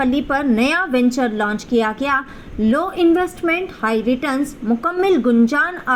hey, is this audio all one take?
yes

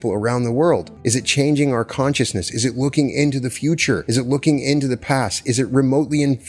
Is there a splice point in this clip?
yes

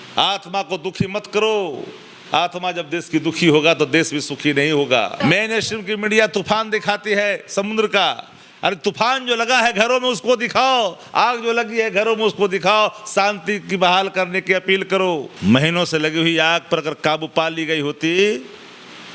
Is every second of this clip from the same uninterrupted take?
no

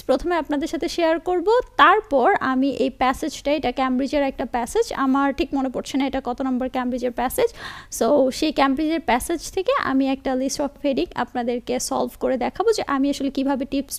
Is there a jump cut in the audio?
no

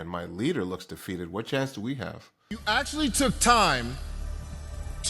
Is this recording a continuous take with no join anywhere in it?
no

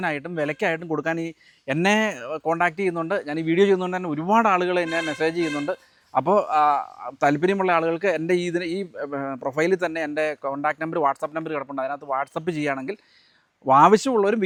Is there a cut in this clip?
no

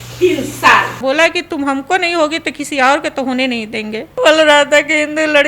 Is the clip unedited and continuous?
no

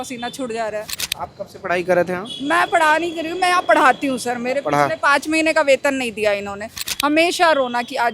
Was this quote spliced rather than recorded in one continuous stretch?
yes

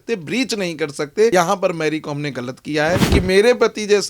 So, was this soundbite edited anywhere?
yes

